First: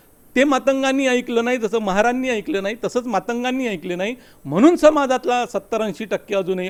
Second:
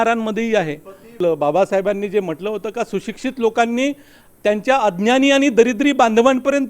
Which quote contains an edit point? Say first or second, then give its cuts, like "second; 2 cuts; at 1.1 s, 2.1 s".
second; 1 cut; at 1.2 s